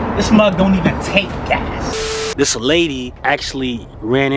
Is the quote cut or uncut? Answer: cut